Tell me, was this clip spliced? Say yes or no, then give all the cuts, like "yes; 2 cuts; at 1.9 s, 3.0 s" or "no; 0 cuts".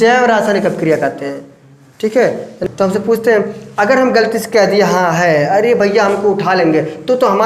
yes; 1 cut; at 2.6 s